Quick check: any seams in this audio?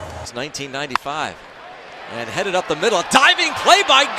no; 0 cuts

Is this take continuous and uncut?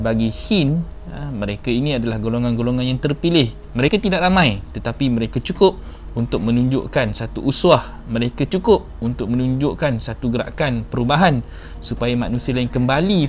no; 1 cut; at 3.9 s

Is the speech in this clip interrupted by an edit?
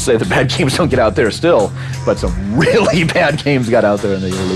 no; 0 cuts

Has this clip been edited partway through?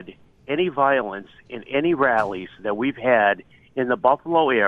no; 0 cuts

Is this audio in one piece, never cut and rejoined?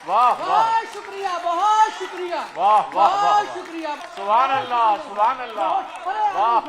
no; 1 cut; at 3.9 s

